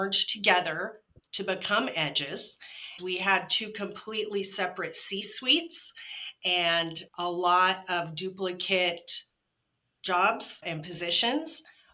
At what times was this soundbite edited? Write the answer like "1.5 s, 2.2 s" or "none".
2.9 s